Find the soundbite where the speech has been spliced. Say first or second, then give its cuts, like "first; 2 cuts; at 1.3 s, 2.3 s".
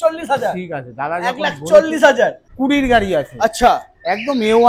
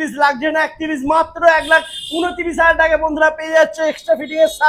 first; 1 cut; at 2.4 s